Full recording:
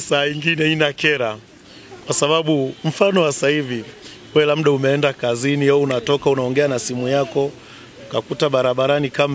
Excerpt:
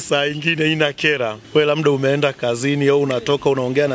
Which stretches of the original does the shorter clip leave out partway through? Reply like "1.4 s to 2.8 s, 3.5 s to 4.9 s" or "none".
1.4 s to 4.2 s